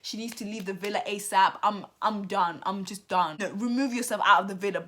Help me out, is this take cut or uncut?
cut